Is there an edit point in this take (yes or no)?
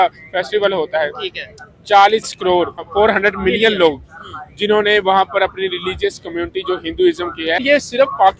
yes